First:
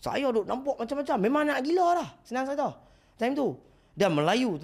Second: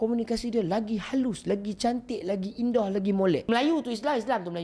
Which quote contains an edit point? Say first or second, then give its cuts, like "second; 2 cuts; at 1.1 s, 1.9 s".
second; 1 cut; at 3.4 s